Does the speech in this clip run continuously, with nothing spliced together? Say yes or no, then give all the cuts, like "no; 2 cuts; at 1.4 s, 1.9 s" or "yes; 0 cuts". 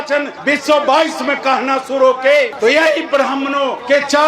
yes; 0 cuts